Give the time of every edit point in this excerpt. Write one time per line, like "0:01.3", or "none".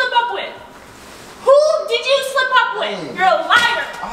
0:03.1